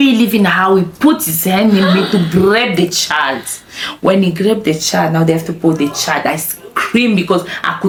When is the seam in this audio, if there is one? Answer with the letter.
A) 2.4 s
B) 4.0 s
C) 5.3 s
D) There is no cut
D